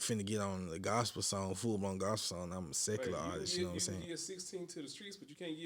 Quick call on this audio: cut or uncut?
uncut